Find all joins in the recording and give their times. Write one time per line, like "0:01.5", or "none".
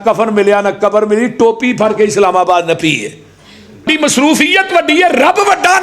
0:03.9